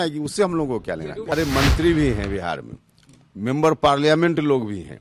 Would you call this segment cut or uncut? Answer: cut